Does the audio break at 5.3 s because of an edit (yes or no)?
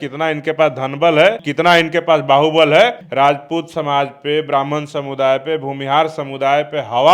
no